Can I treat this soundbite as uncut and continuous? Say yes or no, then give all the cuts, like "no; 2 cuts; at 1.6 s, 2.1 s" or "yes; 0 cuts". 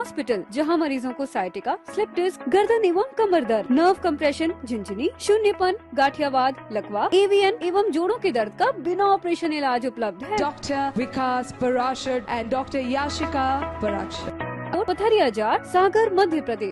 no; 1 cut; at 14.7 s